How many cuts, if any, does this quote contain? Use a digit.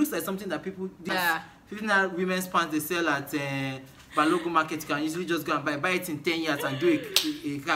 1